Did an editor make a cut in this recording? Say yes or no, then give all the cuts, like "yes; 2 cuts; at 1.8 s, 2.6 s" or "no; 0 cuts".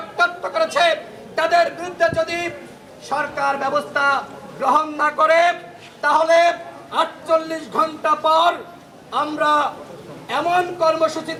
no; 0 cuts